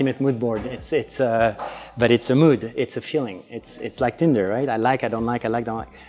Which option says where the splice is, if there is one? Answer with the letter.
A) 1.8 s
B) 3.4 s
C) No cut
C